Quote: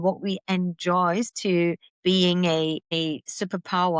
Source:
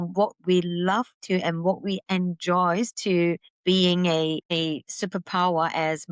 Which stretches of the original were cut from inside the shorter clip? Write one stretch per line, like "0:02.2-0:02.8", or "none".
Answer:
none